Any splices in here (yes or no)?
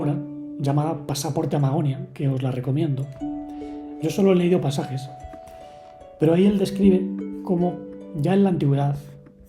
no